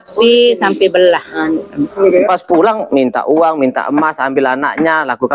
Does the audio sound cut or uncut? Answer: cut